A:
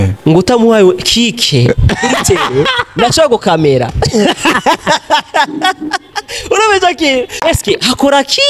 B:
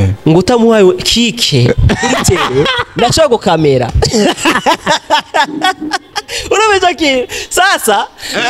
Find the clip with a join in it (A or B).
A